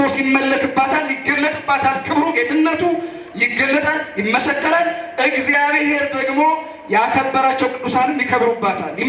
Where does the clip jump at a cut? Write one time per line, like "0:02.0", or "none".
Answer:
none